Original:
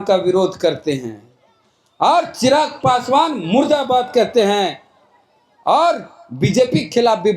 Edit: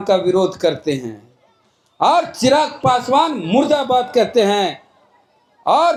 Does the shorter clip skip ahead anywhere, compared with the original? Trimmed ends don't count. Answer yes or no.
no